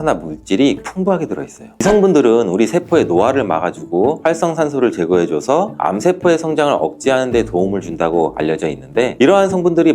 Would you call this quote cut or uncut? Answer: cut